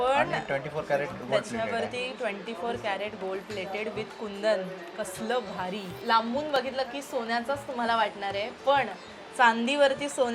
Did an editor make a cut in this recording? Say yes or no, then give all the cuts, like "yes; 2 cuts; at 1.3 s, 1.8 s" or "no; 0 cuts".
yes; 1 cut; at 5.9 s